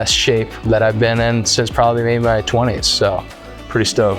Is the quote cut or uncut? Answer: uncut